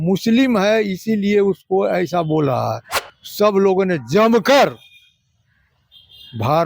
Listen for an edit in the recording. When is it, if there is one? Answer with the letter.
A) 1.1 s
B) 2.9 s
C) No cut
B